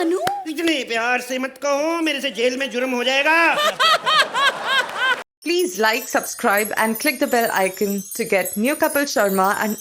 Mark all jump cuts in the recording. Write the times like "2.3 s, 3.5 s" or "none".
5.2 s